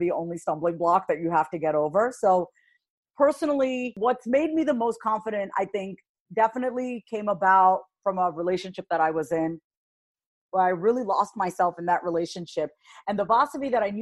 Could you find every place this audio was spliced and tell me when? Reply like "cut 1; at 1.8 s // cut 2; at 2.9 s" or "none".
cut 1; at 3.9 s